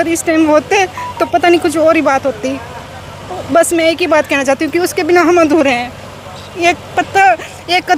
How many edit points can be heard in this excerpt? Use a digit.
0